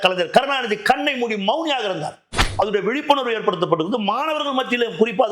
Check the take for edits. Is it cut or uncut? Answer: cut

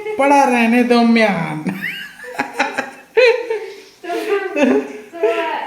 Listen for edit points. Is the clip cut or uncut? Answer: uncut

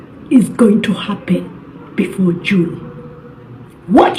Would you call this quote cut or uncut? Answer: uncut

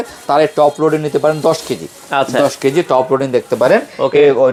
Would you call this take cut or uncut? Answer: uncut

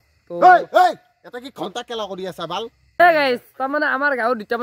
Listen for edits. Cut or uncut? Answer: cut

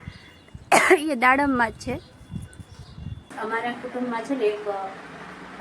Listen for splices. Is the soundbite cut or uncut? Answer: cut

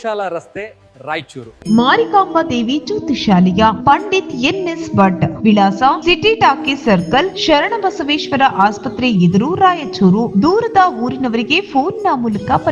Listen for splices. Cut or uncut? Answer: cut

